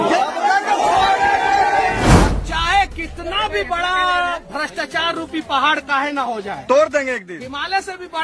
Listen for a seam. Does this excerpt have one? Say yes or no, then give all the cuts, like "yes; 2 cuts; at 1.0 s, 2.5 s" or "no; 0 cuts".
yes; 1 cut; at 2.0 s